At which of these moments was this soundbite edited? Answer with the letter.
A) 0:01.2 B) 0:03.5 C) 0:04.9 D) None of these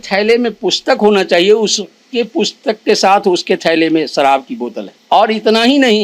C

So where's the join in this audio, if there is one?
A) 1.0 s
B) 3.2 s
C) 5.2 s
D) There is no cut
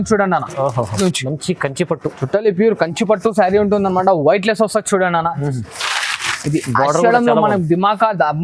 A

